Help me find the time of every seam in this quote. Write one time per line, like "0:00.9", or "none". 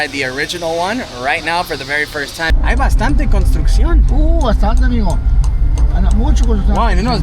0:02.5